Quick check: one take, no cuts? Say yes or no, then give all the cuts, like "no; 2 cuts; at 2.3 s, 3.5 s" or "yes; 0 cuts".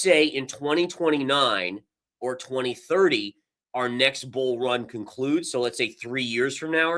yes; 0 cuts